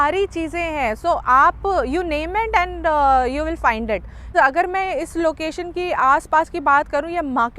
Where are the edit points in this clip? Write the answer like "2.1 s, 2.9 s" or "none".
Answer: 4.3 s